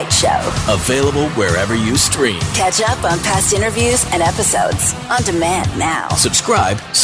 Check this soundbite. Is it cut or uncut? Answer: uncut